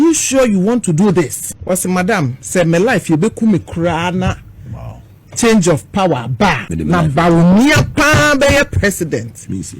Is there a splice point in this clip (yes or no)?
yes